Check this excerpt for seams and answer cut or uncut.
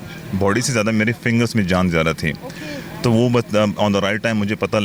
uncut